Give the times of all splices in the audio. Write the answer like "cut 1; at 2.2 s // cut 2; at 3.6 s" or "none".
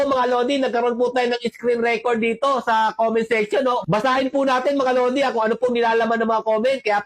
none